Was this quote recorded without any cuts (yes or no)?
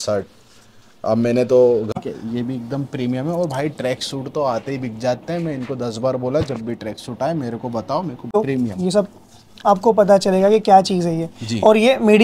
no